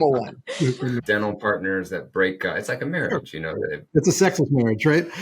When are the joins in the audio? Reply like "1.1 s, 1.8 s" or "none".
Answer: 1.0 s, 3.8 s